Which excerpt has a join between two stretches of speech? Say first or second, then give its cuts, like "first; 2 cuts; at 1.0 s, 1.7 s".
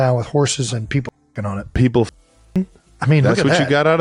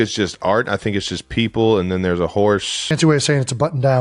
second; 1 cut; at 2.8 s